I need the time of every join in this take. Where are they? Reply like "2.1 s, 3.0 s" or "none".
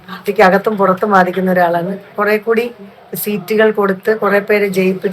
2.1 s